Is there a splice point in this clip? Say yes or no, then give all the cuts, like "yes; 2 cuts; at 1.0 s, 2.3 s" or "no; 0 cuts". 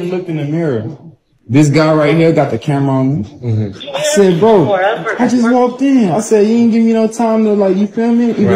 no; 0 cuts